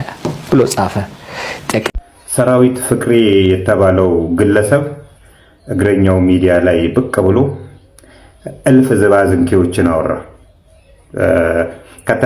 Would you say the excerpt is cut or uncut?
cut